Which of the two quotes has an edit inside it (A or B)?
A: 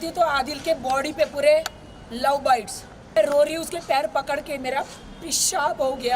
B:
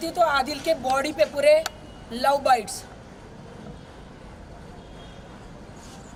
A